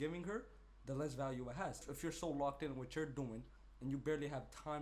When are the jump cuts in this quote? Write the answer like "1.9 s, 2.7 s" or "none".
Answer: 1.8 s

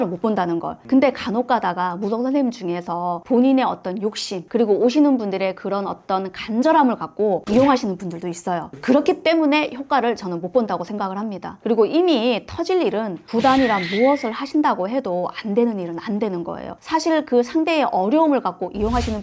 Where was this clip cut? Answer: 11.6 s, 16.8 s

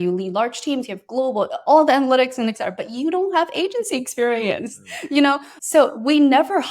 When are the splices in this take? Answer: 5.5 s

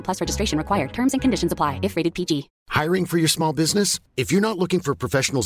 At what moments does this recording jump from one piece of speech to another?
2.6 s

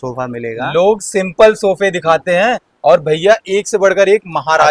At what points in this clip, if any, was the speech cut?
none

